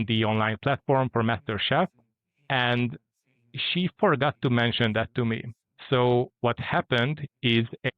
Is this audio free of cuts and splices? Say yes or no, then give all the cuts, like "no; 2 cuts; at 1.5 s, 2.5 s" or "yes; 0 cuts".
yes; 0 cuts